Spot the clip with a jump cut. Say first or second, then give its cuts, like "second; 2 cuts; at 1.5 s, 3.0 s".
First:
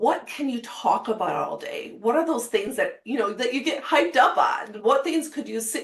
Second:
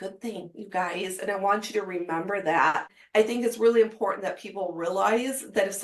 second; 1 cut; at 2.9 s